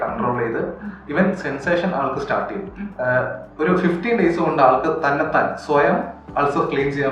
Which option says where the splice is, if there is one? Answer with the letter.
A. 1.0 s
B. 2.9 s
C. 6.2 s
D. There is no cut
B